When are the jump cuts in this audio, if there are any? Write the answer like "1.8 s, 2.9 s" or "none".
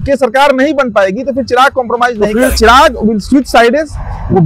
2.5 s